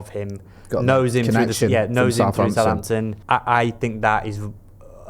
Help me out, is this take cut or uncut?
cut